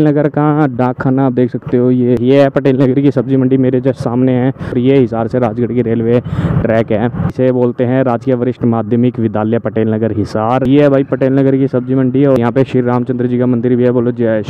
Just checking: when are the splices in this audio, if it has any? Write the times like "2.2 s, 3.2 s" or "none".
2.2 s, 4.7 s, 7.3 s, 10.7 s, 12.4 s